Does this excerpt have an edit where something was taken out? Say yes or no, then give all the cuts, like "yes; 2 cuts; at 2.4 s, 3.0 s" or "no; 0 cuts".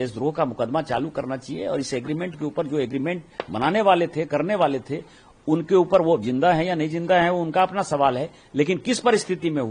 no; 0 cuts